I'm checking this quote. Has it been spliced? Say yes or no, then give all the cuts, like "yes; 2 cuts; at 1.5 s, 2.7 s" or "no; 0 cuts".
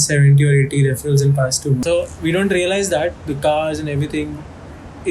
yes; 1 cut; at 1.8 s